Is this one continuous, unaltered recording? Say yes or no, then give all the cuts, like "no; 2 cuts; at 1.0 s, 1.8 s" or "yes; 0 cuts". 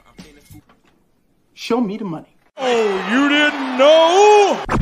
yes; 0 cuts